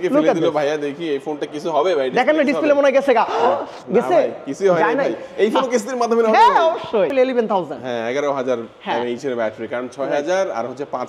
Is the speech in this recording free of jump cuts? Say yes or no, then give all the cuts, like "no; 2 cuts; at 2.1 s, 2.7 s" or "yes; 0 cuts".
no; 1 cut; at 7.1 s